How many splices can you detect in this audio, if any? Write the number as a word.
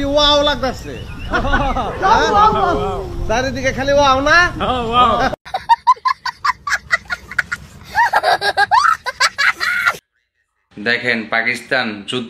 zero